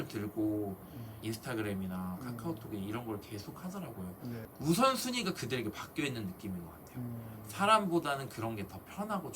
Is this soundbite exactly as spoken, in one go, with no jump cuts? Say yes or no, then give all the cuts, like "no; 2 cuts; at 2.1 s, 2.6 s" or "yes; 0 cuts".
no; 2 cuts; at 1.1 s, 4.4 s